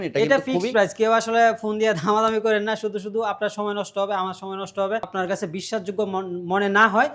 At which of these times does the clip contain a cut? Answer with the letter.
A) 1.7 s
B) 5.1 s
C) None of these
B